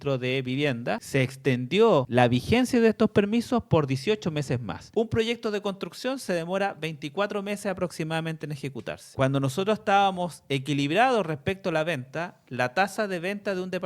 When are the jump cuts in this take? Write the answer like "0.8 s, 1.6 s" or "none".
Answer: 1.0 s, 2.1 s, 4.8 s, 9.0 s

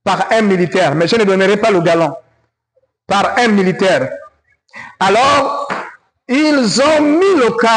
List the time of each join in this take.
none

